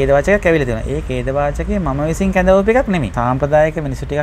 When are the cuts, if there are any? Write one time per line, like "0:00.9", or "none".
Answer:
0:03.1